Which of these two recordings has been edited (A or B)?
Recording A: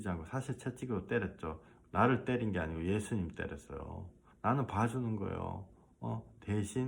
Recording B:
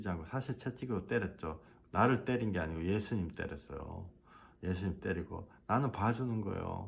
A